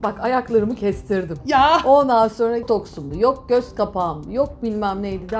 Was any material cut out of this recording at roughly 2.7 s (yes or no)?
yes